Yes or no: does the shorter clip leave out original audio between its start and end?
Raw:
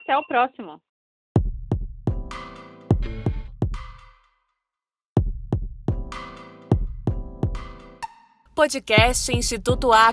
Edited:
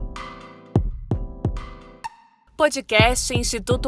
yes